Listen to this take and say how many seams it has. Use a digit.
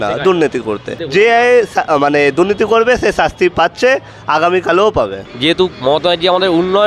2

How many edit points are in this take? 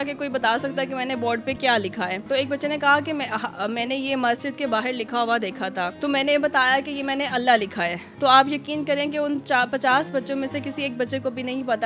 3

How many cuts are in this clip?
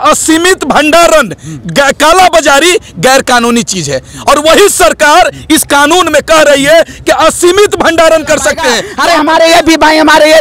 1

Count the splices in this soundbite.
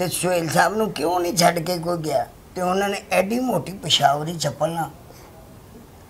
1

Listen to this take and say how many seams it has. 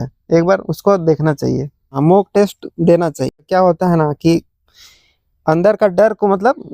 2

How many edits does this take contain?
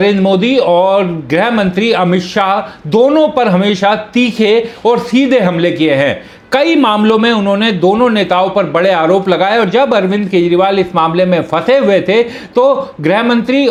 0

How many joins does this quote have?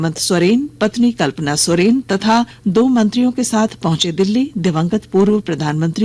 1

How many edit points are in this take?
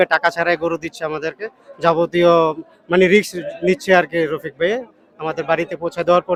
0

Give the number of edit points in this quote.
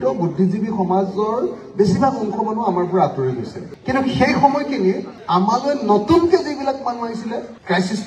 0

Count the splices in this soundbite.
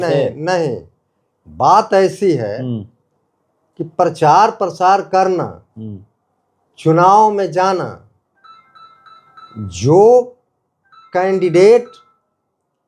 0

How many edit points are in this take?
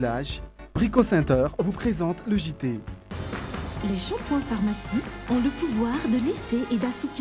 1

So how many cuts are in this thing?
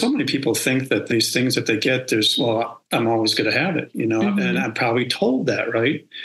2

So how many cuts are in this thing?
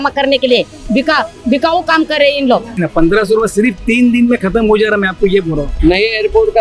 2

